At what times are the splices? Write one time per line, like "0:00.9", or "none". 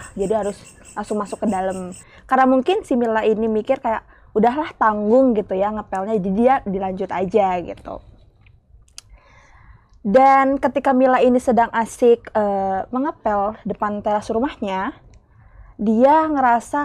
none